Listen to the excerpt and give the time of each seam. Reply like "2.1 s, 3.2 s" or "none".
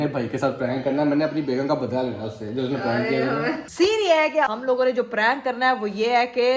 none